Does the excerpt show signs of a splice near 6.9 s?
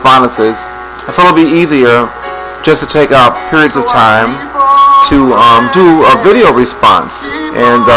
yes; 1 cut; at 6.9 s

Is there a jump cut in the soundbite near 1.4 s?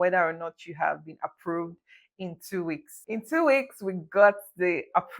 no; 1 cut; at 2.9 s

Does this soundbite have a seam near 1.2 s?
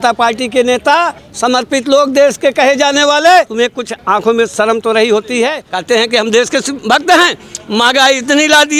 yes; 4 cuts; at 1.2 s, 3.6 s, 5.7 s, 6.7 s

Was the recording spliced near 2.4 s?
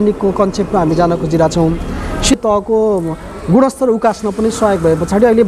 yes; 1 cut; at 2.4 s

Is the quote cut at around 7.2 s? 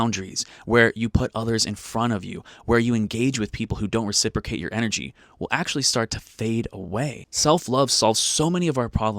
yes; 1 cut; at 7.2 s

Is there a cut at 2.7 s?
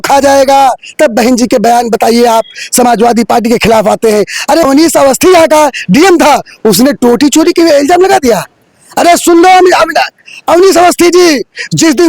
no; 1 cut; at 4.6 s

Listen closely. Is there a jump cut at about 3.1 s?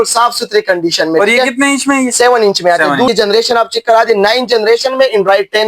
yes; 1 cut; at 3.1 s

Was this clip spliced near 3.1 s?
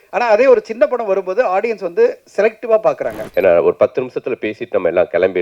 yes; 1 cut; at 3.1 s

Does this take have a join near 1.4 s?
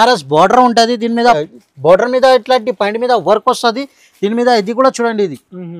yes; 1 cut; at 1.4 s

